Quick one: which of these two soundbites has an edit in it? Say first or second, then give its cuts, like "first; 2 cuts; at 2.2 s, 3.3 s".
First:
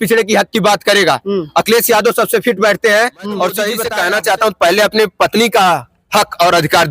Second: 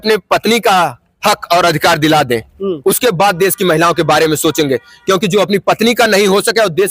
first; 1 cut; at 3.9 s